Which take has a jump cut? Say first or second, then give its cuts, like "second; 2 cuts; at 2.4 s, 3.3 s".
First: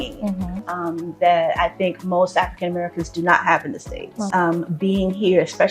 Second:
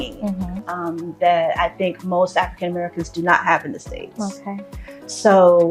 first; 1 cut; at 4.3 s